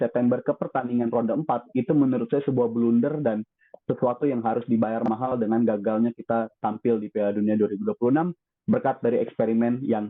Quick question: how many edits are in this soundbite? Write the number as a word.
zero